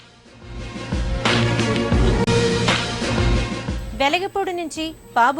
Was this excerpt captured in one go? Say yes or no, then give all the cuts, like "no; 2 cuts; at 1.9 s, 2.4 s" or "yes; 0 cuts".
no; 1 cut; at 2.2 s